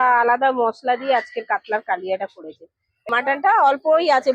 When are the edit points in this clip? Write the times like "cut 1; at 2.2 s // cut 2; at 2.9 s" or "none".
cut 1; at 3.1 s

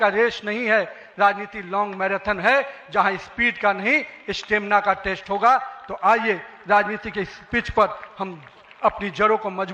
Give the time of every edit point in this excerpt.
none

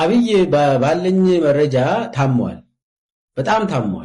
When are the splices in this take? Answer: none

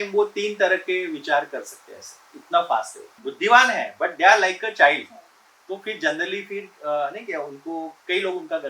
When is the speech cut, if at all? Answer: cut 1; at 3.0 s

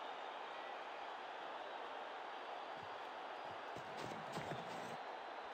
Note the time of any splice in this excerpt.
none

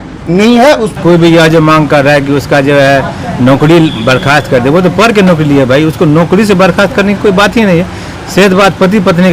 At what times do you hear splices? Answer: cut 1; at 1.0 s

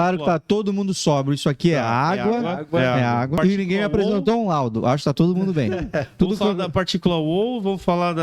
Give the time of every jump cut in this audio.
cut 1; at 3.4 s

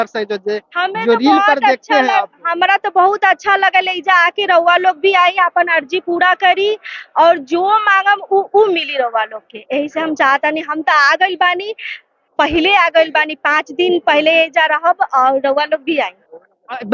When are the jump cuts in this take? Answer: none

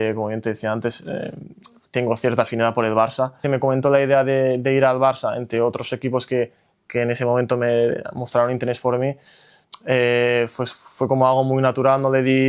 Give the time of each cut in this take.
cut 1; at 3.4 s

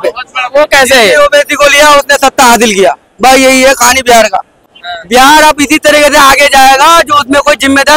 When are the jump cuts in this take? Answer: cut 1; at 4.8 s

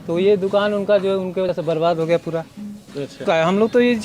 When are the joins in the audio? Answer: cut 1; at 1.5 s // cut 2; at 3.2 s

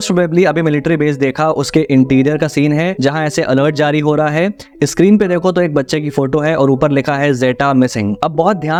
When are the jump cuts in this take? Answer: none

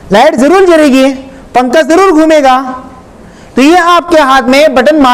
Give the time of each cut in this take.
none

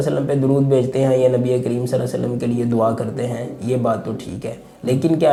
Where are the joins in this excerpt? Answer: none

